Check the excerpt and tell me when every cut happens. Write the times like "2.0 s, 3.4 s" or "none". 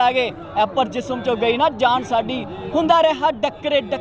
none